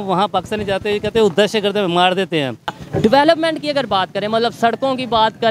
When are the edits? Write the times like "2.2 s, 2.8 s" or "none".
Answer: 2.8 s